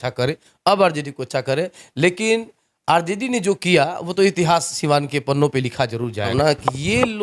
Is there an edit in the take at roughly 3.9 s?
no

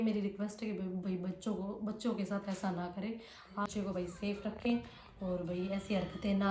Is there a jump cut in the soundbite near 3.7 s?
yes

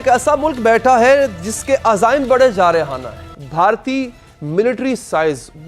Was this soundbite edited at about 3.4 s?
yes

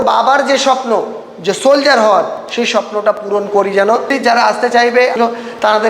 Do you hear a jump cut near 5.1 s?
yes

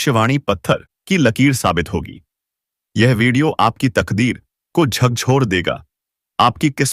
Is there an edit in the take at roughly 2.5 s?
no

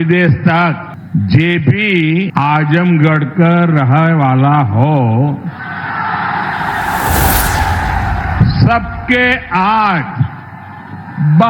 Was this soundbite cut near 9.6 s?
no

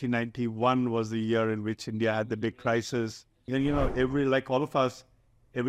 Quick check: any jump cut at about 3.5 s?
yes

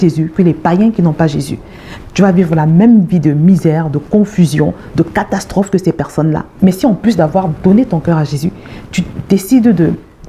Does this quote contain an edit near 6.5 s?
yes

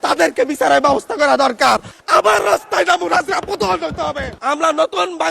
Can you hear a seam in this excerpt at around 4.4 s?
yes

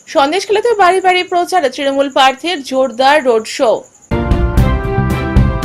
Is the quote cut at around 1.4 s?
no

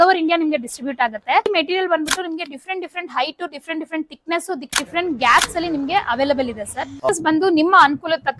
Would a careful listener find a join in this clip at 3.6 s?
no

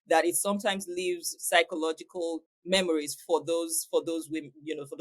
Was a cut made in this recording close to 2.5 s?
yes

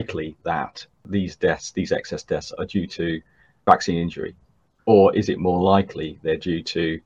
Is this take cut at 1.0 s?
no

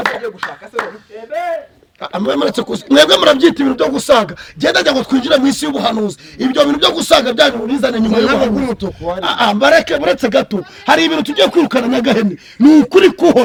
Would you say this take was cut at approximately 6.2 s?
no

